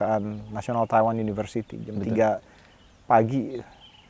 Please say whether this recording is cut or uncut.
uncut